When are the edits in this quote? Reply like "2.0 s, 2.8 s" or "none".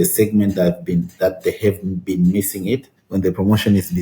3.0 s